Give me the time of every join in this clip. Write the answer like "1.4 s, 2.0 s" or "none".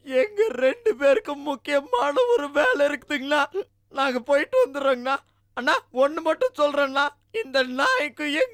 none